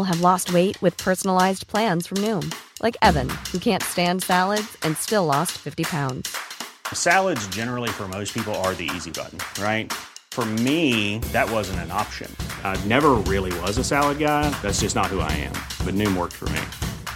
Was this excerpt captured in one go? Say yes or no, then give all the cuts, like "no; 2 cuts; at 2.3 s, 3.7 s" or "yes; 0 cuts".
yes; 0 cuts